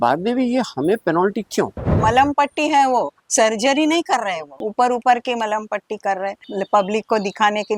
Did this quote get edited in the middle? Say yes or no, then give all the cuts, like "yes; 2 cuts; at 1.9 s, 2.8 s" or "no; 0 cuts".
yes; 3 cuts; at 1.9 s, 4.5 s, 6.4 s